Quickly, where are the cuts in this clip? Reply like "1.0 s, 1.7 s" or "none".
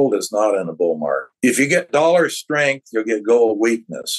1.4 s